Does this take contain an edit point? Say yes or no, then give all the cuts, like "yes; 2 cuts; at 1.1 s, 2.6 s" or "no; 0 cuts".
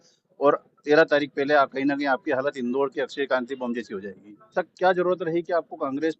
yes; 1 cut; at 4.5 s